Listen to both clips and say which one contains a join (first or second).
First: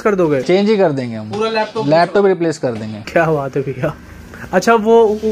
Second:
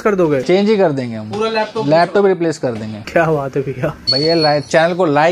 second